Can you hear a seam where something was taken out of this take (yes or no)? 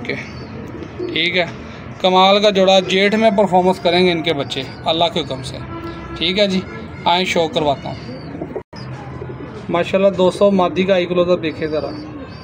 no